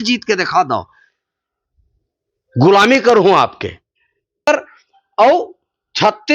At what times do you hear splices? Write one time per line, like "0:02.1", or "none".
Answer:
0:04.3